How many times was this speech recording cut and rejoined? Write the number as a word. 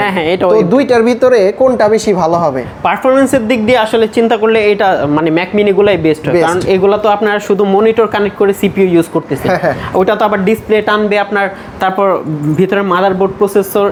zero